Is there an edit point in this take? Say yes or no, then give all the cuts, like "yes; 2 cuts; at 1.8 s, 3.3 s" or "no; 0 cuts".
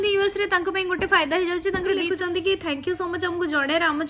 yes; 1 cut; at 2.0 s